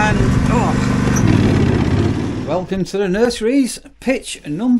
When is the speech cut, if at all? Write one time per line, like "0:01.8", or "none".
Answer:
0:02.3